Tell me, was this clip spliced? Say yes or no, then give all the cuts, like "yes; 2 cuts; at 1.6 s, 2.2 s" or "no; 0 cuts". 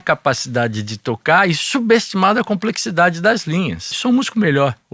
yes; 1 cut; at 3.9 s